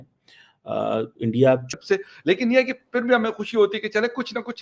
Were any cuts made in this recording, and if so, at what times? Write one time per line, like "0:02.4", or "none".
0:01.7